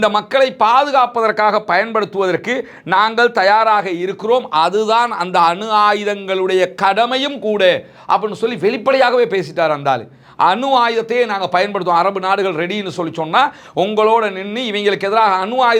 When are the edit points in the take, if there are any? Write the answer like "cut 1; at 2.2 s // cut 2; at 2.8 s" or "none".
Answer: none